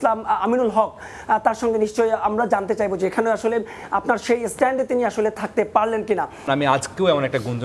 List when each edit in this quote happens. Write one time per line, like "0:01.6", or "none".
0:06.5